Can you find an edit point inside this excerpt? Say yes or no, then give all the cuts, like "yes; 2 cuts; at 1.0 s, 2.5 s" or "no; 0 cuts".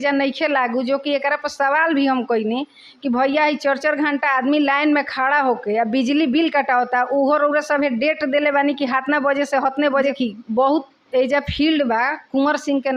yes; 1 cut; at 10.0 s